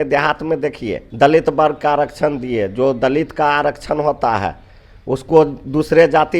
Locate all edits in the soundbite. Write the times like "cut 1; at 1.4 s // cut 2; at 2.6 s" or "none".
cut 1; at 1.0 s